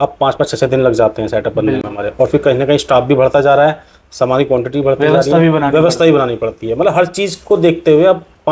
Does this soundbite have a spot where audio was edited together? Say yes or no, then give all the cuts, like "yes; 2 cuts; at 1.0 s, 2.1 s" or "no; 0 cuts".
no; 0 cuts